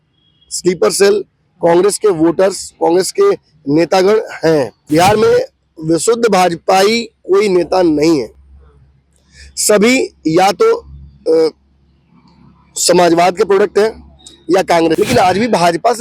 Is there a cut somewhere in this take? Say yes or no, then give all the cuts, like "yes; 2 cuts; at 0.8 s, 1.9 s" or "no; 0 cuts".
yes; 2 cuts; at 4.8 s, 15.0 s